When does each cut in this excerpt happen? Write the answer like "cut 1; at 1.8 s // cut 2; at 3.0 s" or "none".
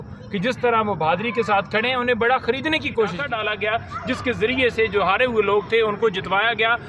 cut 1; at 3.3 s